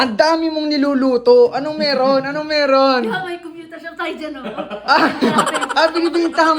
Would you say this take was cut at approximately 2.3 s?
no; 0 cuts

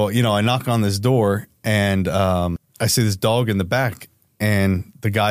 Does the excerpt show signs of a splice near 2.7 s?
yes; 1 cut; at 2.7 s

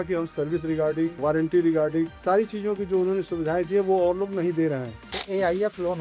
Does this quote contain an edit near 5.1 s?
yes; 3 cuts; at 1.2 s, 2.2 s, 5.1 s

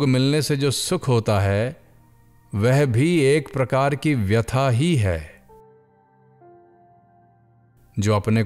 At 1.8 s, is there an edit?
no; 2 cuts; at 5.4 s, 7.6 s

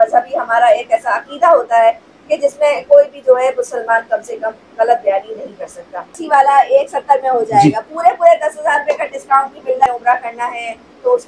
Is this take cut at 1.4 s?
no; 2 cuts; at 6.2 s, 9.9 s

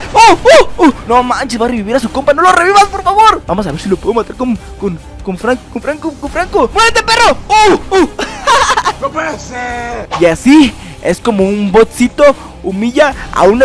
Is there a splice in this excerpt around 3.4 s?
yes; 4 cuts; at 1.0 s, 3.4 s, 6.7 s, 10.0 s

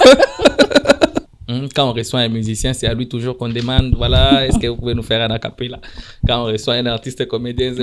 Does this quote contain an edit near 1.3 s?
yes; 1 cut; at 1.3 s

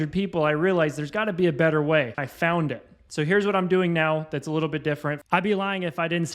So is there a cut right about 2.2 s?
yes; 2 cuts; at 2.2 s, 5.2 s

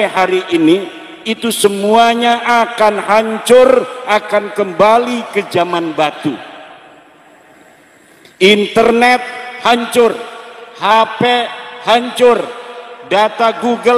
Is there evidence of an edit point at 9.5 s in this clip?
no; 0 cuts

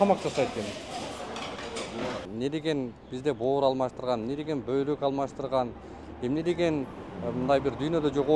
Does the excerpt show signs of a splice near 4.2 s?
no; 1 cut; at 2.2 s

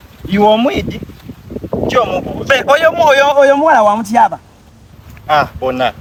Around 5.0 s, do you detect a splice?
no; 0 cuts

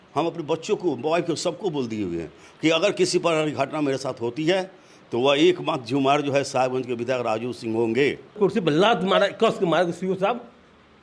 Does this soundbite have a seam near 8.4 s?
yes; 1 cut; at 8.4 s

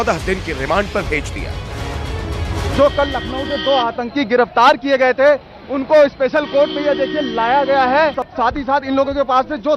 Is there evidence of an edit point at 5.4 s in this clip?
no; 1 cut; at 8.2 s

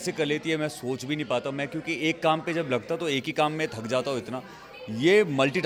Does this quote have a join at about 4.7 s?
no; 0 cuts

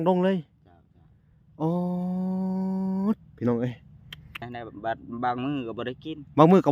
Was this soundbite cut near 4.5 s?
yes; 1 cut; at 4.5 s

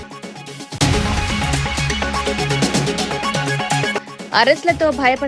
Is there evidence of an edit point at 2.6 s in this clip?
no; 2 cuts; at 0.8 s, 3.9 s

